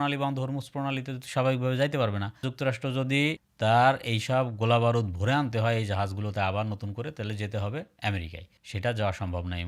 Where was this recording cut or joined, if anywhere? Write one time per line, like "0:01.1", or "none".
none